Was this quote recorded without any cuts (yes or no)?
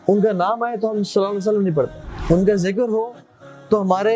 no